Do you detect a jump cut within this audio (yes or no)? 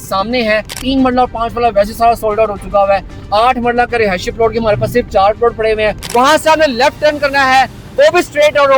yes